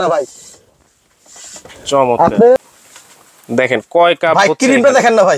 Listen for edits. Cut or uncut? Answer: cut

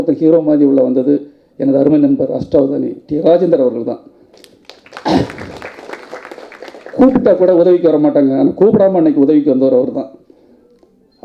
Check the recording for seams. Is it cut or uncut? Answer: uncut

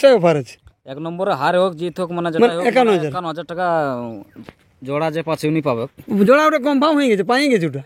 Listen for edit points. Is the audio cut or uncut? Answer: uncut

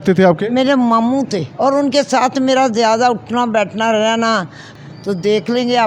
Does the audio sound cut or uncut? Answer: cut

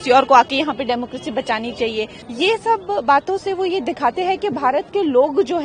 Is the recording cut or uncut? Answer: cut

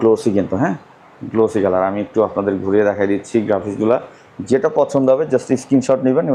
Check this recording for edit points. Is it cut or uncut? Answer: uncut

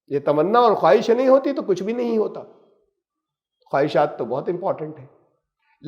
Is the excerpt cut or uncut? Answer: uncut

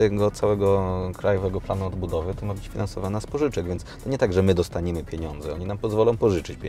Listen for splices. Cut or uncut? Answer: uncut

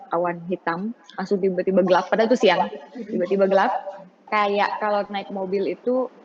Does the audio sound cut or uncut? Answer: cut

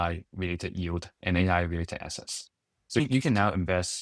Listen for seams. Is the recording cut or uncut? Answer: cut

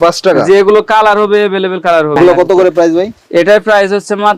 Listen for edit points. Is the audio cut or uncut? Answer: cut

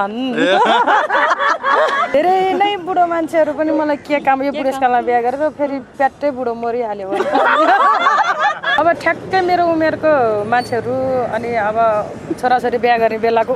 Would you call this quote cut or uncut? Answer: cut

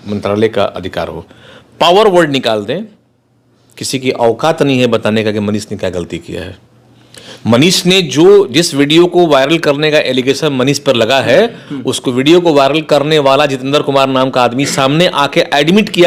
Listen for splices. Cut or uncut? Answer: uncut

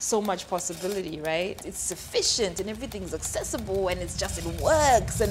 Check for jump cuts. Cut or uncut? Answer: cut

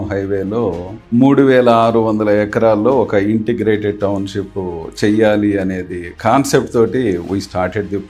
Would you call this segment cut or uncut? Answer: uncut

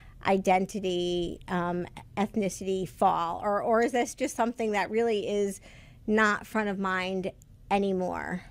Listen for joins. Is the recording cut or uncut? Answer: cut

